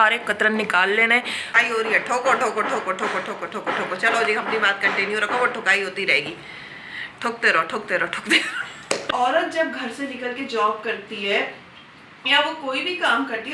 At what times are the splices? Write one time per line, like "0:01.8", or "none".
0:01.6
0:09.1